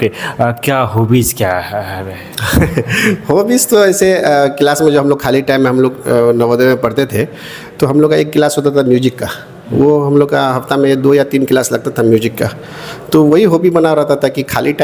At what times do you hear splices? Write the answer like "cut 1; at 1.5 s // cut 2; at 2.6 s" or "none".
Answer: none